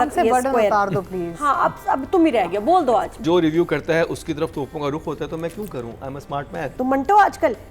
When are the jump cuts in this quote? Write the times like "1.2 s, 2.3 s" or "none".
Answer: 3.2 s, 6.6 s